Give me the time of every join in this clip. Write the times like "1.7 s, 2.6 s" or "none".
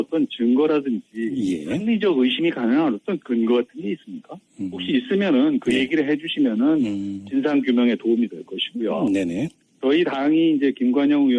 2.9 s